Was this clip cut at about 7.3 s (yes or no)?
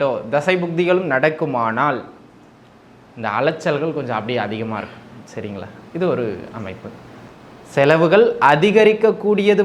yes